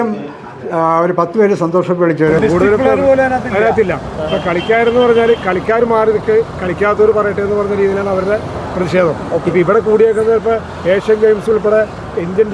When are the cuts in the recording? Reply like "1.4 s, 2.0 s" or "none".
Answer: 2.4 s